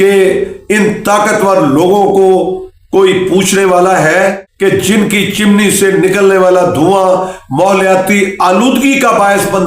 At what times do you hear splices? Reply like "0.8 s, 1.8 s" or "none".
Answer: 4.5 s